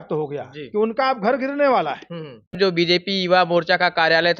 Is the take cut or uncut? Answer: cut